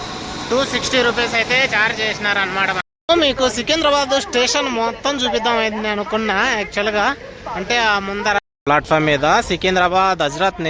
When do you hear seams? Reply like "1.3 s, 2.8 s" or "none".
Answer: 2.9 s, 8.4 s